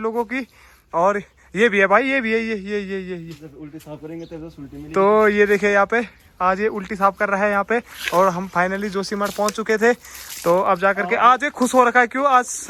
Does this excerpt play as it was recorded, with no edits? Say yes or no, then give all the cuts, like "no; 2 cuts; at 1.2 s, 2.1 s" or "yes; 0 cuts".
yes; 0 cuts